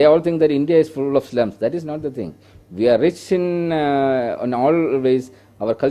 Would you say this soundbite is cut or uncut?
uncut